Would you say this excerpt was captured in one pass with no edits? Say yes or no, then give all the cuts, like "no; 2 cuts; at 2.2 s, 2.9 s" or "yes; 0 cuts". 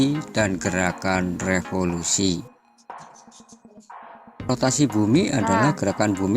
no; 2 cuts; at 0.8 s, 3.9 s